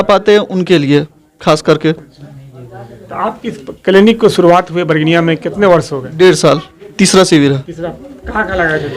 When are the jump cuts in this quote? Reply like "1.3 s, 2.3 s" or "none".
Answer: 6.9 s